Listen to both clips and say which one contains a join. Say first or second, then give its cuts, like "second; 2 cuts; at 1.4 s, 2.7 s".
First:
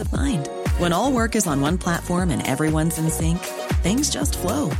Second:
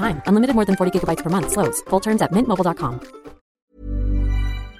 second; 1 cut; at 3.5 s